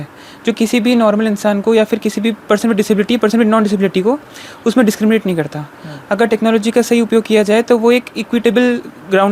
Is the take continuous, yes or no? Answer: yes